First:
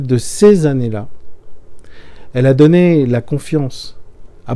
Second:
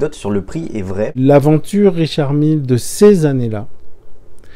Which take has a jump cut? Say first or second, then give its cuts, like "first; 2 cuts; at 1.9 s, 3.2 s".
second; 1 cut; at 1.1 s